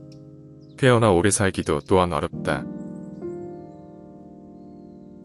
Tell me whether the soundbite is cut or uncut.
uncut